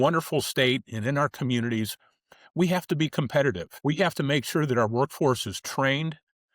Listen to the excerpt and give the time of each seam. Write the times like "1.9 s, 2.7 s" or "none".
3.7 s